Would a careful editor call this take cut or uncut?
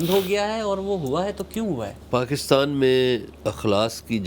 cut